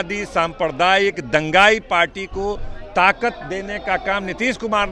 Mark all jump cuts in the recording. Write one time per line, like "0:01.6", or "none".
none